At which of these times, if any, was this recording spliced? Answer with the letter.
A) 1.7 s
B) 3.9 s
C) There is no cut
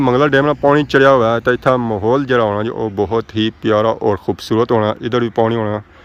C